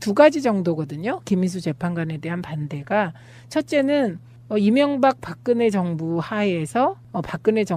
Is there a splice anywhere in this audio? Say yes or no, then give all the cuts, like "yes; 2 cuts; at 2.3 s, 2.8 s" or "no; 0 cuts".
no; 0 cuts